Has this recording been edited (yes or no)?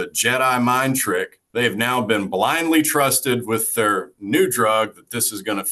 yes